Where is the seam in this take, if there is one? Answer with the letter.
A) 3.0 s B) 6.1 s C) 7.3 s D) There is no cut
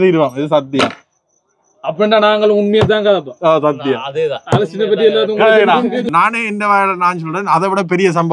B